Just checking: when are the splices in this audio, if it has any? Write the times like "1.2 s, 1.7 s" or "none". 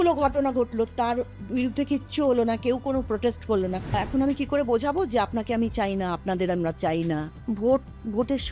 3.9 s, 7.3 s

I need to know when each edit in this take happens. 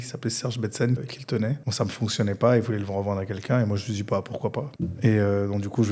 1.0 s, 4.7 s

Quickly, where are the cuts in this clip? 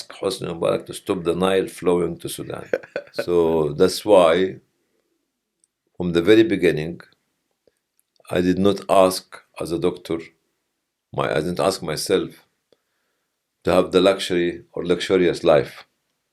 3.1 s

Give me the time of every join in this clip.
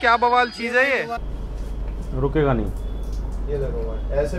1.2 s

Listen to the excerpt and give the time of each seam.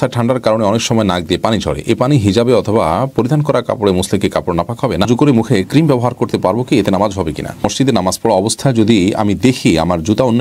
5.1 s, 7.7 s

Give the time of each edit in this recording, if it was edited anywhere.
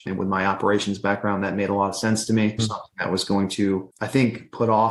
2.6 s

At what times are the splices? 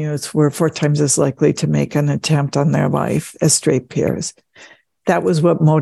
3.3 s

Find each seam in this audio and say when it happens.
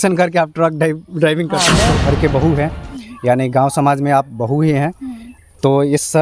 1.8 s

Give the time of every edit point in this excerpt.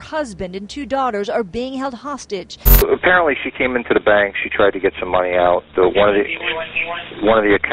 2.8 s

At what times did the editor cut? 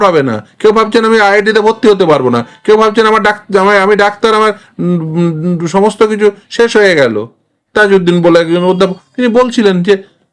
7.6 s

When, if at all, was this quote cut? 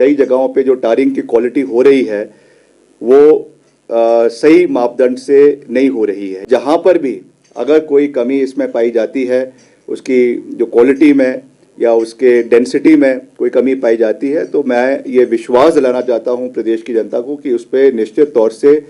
6.4 s

